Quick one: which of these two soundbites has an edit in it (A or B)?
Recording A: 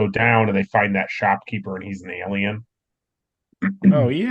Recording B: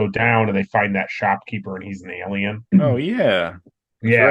B